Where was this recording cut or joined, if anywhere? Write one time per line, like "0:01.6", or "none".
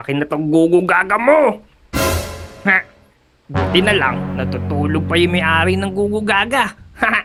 none